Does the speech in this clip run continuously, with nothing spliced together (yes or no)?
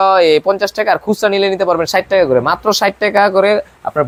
yes